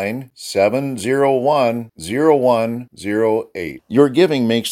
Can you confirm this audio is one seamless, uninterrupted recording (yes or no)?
yes